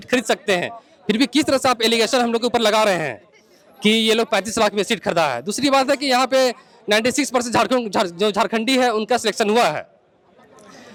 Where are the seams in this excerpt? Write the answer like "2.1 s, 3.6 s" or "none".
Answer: none